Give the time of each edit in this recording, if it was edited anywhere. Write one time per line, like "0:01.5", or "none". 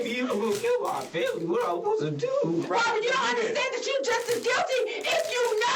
0:02.6

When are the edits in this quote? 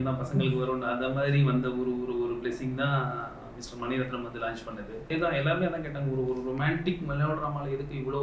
0:05.1

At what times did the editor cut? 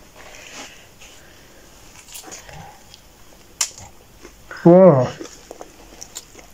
none

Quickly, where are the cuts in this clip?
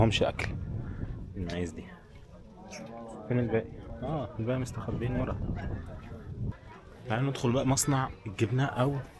none

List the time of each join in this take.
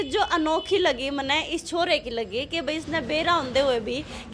none

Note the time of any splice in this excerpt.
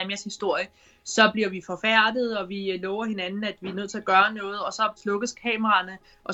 0:05.0

